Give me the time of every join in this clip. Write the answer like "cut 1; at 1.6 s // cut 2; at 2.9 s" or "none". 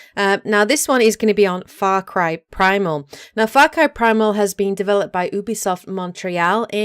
cut 1; at 5.4 s